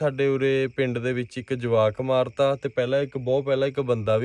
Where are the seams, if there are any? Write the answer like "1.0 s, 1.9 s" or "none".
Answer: none